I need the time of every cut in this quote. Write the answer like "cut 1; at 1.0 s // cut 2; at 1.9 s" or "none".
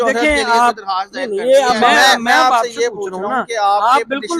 cut 1; at 1.9 s